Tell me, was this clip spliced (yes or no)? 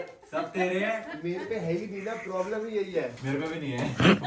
no